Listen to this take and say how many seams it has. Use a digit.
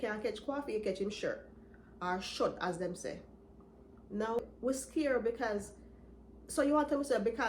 1